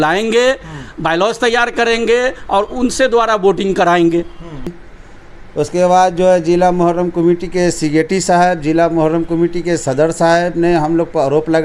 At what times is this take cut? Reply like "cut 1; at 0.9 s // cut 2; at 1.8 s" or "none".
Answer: cut 1; at 4.8 s